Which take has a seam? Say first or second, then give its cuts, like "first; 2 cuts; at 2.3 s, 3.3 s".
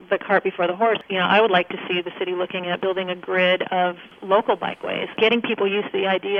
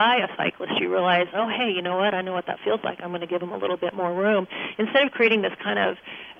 first; 4 cuts; at 1.0 s, 2.8 s, 4.1 s, 5.1 s